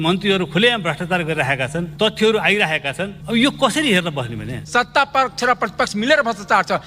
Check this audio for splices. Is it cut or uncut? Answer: cut